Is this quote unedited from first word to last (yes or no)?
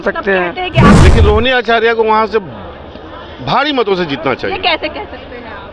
no